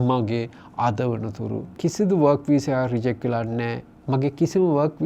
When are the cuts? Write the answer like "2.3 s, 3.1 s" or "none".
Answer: 1.8 s